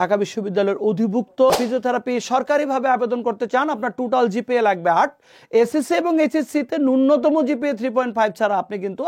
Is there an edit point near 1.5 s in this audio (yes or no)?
yes